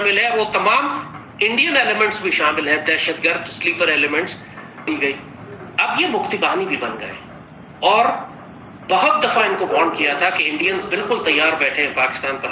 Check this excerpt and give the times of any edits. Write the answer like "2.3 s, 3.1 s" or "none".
4.9 s